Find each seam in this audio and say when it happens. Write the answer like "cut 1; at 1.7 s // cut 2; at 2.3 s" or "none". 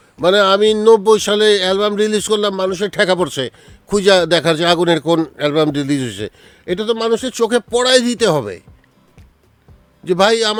none